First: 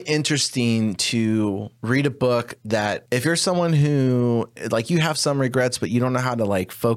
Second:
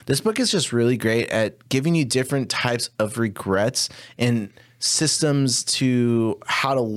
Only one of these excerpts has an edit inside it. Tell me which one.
first; 3 cuts; at 1.7 s, 3.0 s, 4.6 s

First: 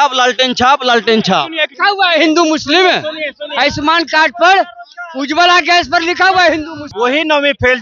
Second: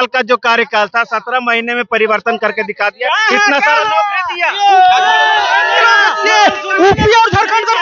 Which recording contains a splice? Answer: first; 2 cuts; at 1.7 s, 6.8 s

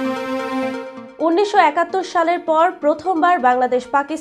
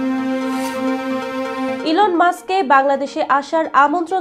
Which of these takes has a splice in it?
second; 1 cut; at 1.8 s

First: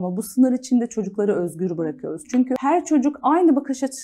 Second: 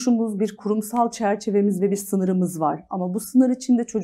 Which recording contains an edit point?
first; 1 cut; at 2.6 s

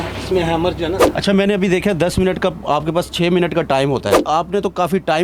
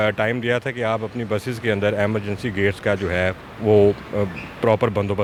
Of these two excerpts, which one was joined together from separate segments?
first; 2 cuts; at 1.1 s, 4.1 s

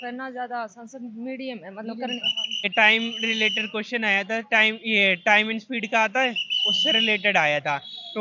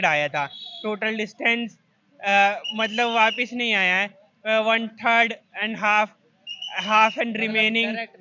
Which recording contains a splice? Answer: first; 1 cut; at 2.7 s

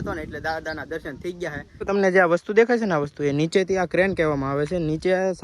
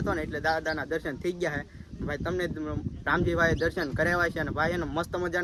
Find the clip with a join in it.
first; 1 cut; at 1.7 s

